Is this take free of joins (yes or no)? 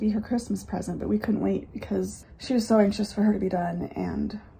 no